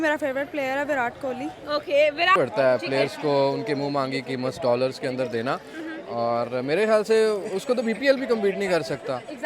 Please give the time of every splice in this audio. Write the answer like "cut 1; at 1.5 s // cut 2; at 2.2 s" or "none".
cut 1; at 2.4 s